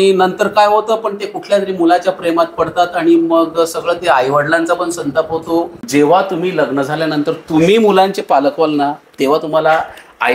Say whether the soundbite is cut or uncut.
cut